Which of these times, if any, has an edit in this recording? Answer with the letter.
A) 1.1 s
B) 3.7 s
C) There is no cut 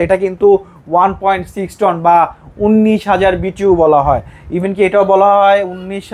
C